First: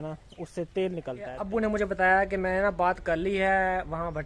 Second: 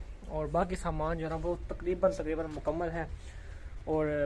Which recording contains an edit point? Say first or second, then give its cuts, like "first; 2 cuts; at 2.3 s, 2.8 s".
first; 1 cut; at 1.4 s